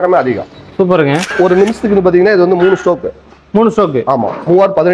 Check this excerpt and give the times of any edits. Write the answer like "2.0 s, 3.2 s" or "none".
1.3 s

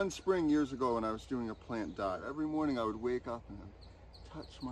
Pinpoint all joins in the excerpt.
2.3 s

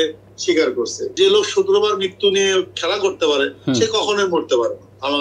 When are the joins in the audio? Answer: 1.0 s

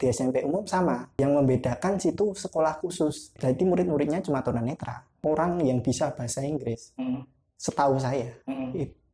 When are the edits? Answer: 1.1 s, 3.3 s, 5.2 s

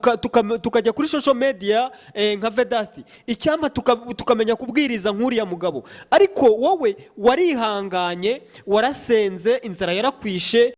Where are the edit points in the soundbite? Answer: none

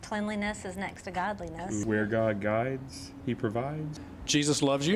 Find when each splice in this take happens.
1.8 s, 3.8 s

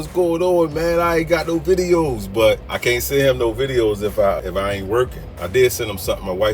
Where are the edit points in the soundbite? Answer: 2.7 s, 4.4 s

